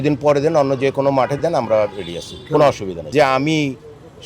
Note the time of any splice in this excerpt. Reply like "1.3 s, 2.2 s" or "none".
2.9 s